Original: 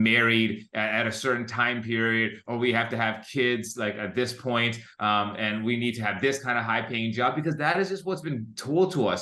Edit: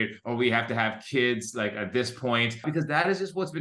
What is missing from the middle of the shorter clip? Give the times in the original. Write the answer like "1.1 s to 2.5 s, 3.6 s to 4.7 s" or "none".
4.9 s to 7.3 s